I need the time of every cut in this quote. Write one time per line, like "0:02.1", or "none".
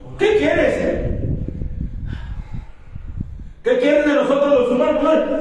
none